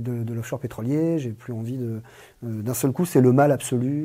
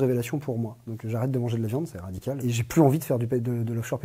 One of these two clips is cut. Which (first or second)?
second